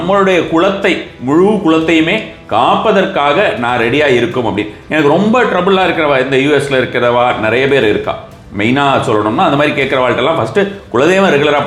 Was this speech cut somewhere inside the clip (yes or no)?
no